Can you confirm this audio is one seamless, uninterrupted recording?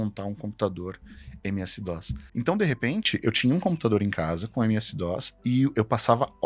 no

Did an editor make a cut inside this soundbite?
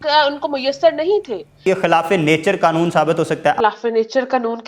yes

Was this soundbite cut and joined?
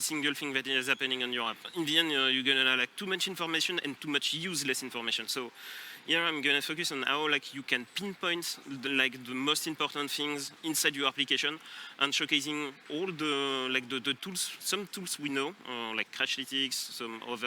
yes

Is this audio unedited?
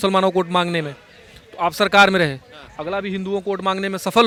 yes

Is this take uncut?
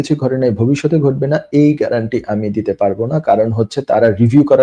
yes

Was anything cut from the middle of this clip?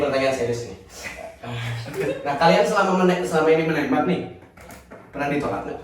no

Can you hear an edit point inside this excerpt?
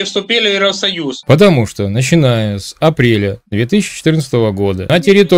yes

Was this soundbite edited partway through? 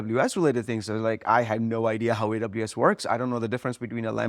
no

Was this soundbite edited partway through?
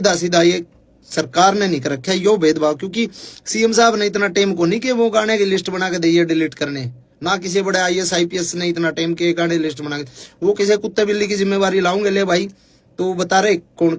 no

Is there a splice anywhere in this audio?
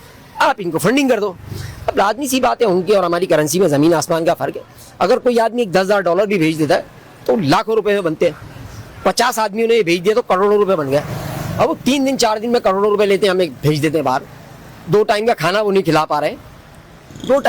no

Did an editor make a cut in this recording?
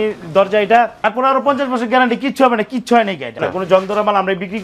yes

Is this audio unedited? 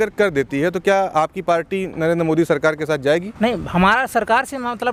yes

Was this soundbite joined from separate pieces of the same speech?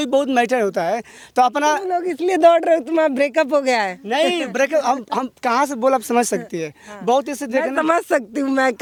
no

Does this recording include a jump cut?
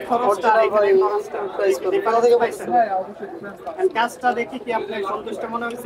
no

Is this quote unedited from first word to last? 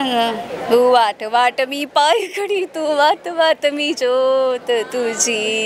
yes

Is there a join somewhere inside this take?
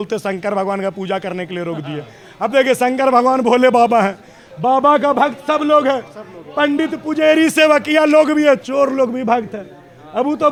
no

